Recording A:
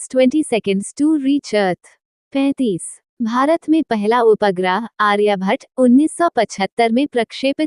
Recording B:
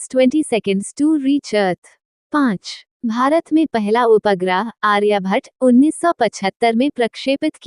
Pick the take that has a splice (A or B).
B